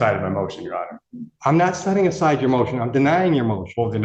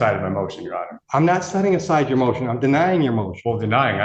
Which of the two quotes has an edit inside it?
second; 1 cut; at 0.9 s

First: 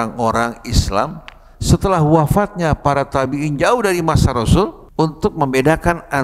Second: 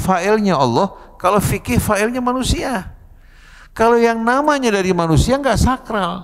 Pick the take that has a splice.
first; 1 cut; at 4.8 s

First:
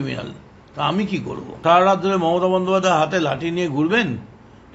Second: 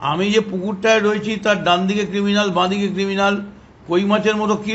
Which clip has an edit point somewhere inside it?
first; 1 cut; at 1.4 s

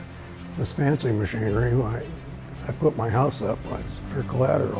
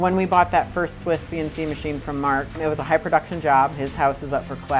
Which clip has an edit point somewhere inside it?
second; 2 cuts; at 2.6 s, 3.8 s

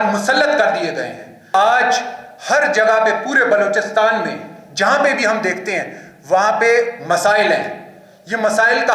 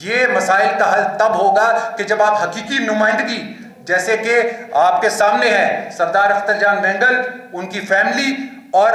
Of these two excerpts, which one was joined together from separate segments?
first; 1 cut; at 1.5 s

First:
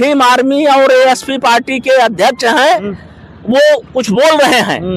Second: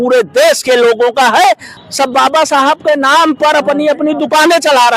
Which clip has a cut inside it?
second; 1 cut; at 1.7 s

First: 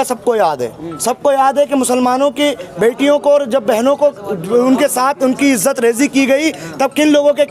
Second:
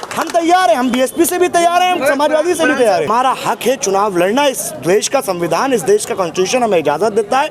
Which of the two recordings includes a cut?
second; 1 cut; at 3.1 s

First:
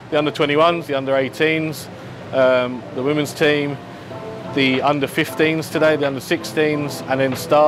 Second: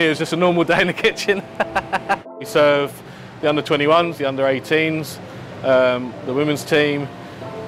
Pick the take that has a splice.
second; 1 cut; at 2.3 s

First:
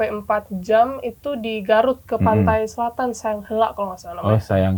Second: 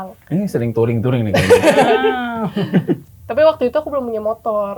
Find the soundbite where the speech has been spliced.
second; 1 cut; at 3.0 s

